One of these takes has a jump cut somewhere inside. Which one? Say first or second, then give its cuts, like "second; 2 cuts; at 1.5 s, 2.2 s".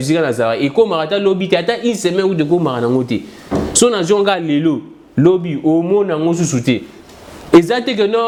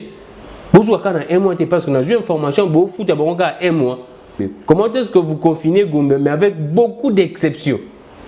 second; 1 cut; at 4.5 s